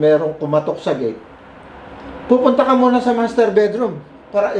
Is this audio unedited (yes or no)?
yes